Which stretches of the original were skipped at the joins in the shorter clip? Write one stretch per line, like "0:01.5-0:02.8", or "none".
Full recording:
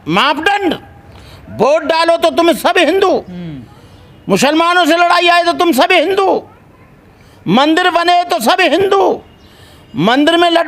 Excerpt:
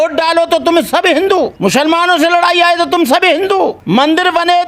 0:03.3-0:04.2
0:06.5-0:07.4